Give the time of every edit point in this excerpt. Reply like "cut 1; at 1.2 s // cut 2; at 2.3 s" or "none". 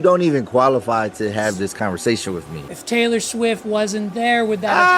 cut 1; at 2.6 s